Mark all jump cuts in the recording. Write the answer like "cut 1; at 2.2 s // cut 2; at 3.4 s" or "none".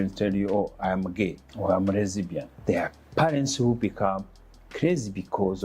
cut 1; at 1.4 s // cut 2; at 2.5 s